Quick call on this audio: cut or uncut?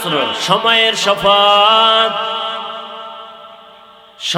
uncut